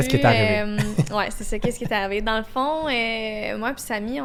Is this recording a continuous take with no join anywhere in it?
yes; 0 cuts

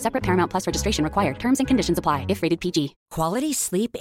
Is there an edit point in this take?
yes; 1 cut; at 3.0 s

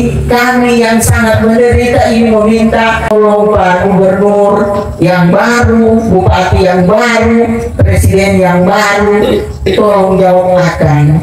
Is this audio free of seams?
no; 1 cut; at 3.1 s

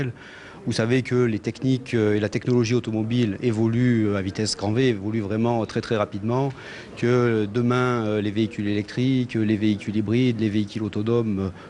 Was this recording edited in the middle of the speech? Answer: no; 0 cuts

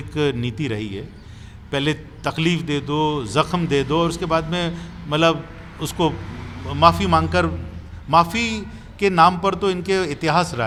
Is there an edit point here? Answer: no; 0 cuts

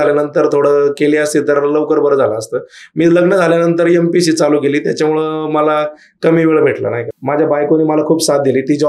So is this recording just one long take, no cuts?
no; 1 cut; at 7.1 s

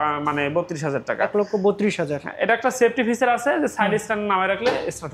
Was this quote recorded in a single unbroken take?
yes; 0 cuts

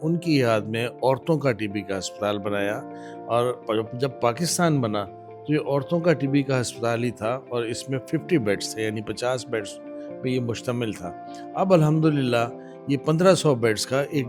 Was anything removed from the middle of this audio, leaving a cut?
no; 0 cuts

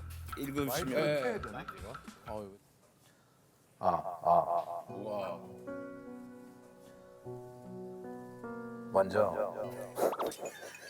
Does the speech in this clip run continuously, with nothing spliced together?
no; 1 cut; at 2.5 s

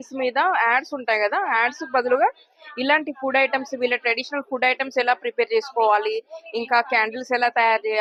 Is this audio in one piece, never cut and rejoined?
yes; 0 cuts

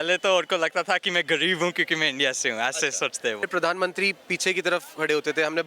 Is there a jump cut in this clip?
yes; 1 cut; at 3.4 s

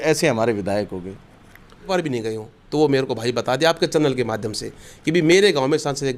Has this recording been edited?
yes; 1 cut; at 1.9 s

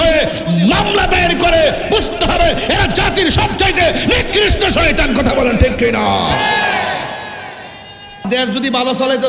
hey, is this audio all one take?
no; 1 cut; at 8.2 s

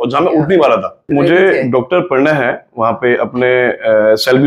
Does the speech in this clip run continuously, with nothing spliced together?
no; 1 cut; at 1.0 s

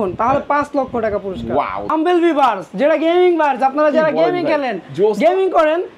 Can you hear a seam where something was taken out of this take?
yes; 1 cut; at 1.9 s

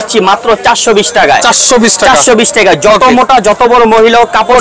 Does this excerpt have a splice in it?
no; 0 cuts

